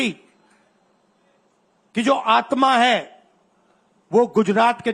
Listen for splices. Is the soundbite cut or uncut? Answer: uncut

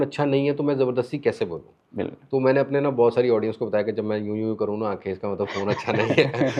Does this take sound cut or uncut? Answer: uncut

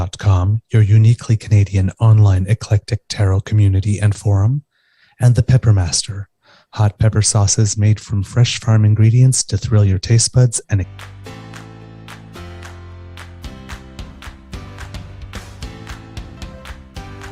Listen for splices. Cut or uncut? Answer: cut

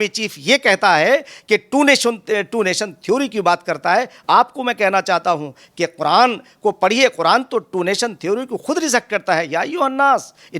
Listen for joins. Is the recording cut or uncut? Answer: uncut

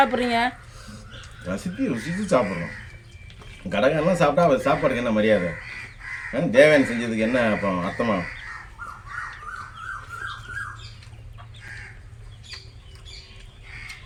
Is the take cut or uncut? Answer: uncut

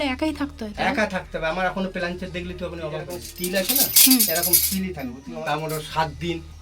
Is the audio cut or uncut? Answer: cut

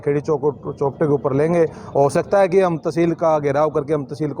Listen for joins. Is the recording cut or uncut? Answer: uncut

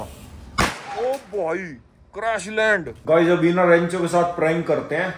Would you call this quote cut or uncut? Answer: cut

